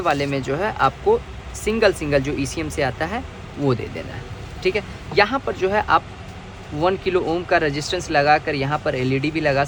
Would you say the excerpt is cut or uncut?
uncut